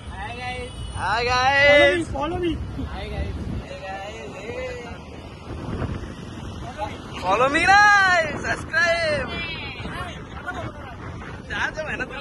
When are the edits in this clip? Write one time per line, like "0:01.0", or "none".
none